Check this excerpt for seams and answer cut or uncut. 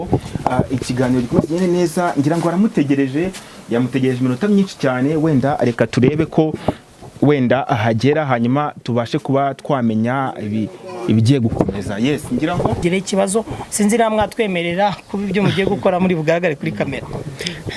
cut